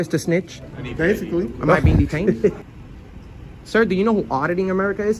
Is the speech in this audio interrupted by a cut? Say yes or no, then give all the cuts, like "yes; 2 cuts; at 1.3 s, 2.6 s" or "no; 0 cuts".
yes; 1 cut; at 2.6 s